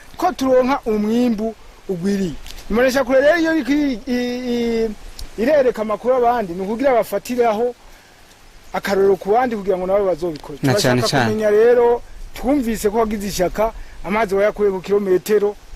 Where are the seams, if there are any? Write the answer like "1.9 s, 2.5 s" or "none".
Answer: none